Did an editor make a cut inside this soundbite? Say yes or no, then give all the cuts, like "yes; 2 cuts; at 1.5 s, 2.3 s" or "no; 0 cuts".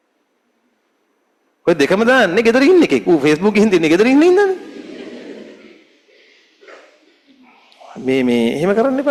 no; 0 cuts